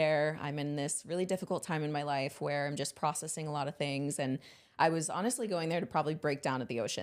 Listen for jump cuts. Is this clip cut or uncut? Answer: uncut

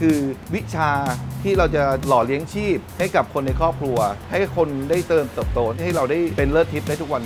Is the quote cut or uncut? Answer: cut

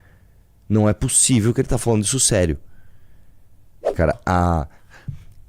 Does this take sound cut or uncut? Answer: cut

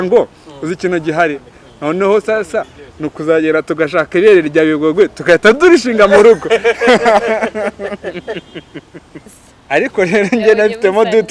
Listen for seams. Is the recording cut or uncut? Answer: cut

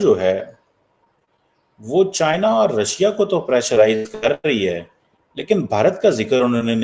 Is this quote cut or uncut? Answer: uncut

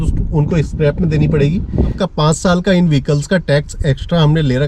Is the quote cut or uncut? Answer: cut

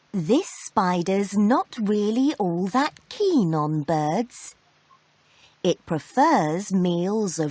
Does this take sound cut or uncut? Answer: uncut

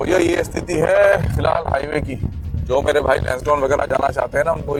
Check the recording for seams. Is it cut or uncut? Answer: uncut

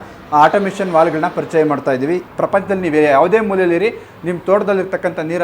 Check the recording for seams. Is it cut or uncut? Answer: cut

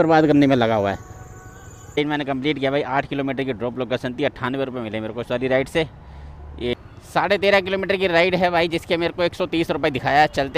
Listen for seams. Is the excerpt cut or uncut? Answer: cut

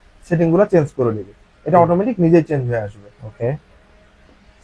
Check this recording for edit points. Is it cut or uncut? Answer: uncut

